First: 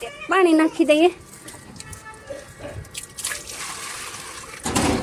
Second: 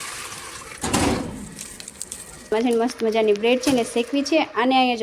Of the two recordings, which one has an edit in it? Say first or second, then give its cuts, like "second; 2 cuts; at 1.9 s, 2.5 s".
second; 1 cut; at 2.5 s